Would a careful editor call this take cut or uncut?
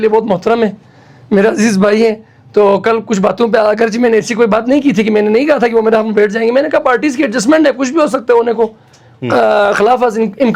uncut